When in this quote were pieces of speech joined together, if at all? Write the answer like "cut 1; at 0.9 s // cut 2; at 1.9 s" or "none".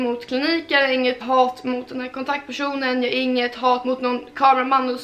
cut 1; at 3.8 s